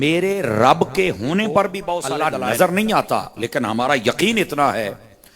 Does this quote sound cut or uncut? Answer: cut